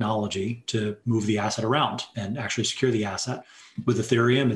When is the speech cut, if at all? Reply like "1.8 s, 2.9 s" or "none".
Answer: 1.0 s, 2.1 s